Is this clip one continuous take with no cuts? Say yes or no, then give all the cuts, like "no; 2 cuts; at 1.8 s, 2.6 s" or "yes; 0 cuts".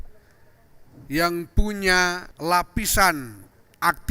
no; 1 cut; at 2.3 s